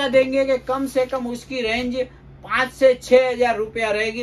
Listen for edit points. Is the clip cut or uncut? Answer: uncut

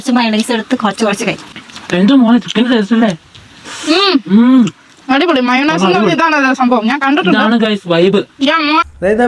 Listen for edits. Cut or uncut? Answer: cut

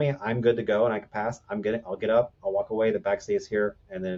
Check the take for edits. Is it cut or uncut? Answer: uncut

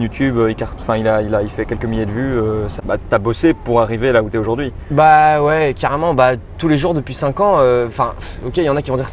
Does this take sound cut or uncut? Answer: cut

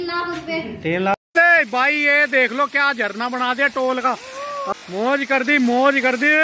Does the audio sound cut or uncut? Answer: cut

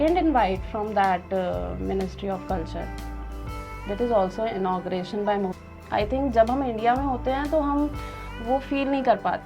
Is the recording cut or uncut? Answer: cut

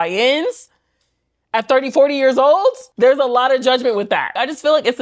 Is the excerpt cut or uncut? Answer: uncut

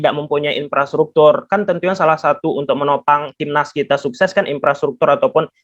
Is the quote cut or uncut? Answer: uncut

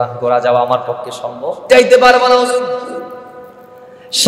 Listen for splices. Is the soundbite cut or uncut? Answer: cut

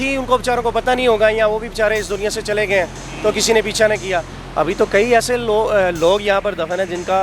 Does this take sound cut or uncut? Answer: cut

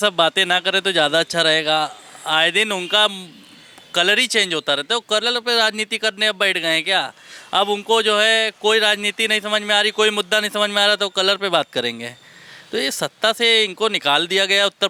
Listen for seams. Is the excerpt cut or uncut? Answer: uncut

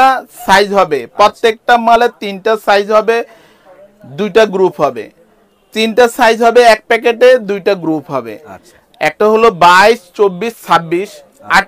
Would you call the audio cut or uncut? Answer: uncut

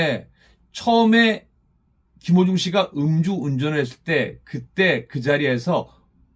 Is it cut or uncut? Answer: uncut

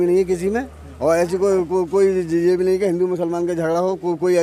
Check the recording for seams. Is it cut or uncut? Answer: uncut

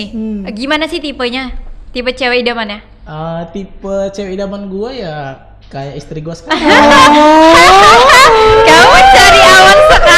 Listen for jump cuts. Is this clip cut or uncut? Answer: uncut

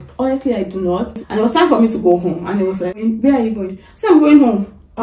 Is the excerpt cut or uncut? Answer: cut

